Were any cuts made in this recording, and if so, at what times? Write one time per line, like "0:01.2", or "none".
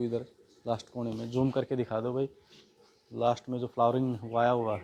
none

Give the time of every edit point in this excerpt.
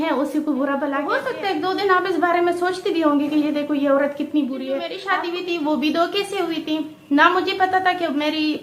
0:01.2
0:05.0

